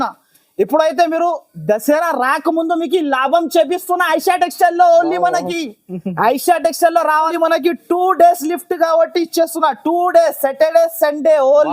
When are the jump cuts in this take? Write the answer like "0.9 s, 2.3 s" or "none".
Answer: 7.3 s